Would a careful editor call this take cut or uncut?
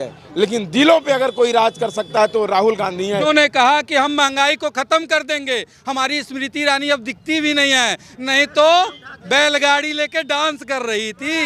cut